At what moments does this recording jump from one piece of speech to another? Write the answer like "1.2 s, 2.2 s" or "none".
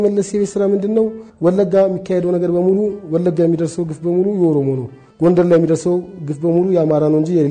1.2 s